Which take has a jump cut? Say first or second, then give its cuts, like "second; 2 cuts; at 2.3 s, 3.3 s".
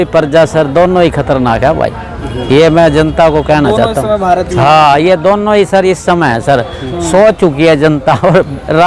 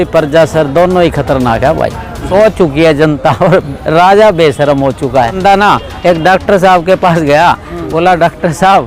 second; 2 cuts; at 2.1 s, 5.4 s